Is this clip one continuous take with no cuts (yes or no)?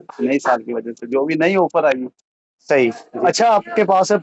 yes